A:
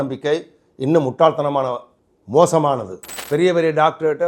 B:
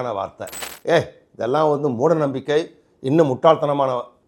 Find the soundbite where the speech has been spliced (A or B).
A